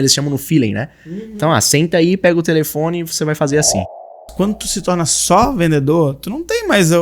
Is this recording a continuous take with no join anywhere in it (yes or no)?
no